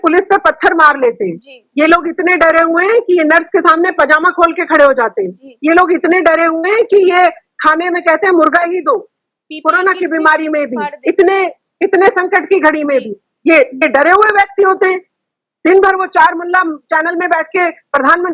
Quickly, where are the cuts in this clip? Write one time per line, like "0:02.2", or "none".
none